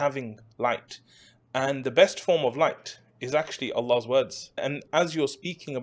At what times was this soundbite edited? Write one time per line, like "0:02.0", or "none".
0:04.8

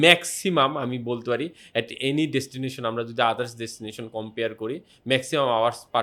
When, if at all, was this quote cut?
none

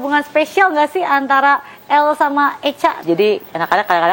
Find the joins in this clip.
0:03.0

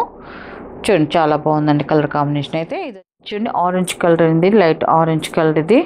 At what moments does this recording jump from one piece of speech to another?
0:02.8

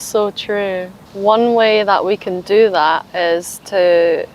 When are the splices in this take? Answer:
0:01.0

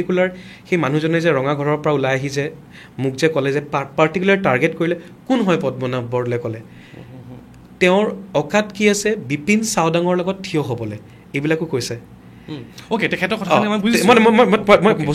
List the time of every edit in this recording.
none

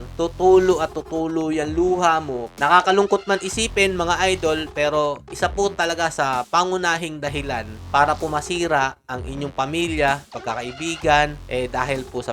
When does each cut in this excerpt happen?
0:02.5
0:11.4

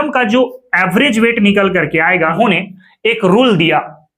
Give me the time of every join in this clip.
0:02.3

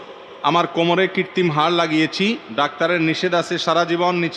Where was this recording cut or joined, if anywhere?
0:02.4

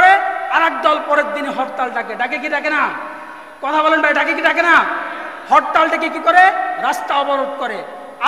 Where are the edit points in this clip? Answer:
none

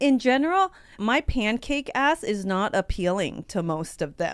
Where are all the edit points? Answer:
0:00.9

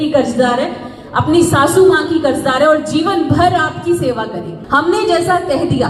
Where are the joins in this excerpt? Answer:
0:04.5

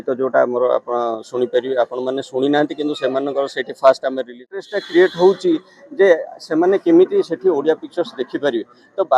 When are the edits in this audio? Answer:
0:04.6

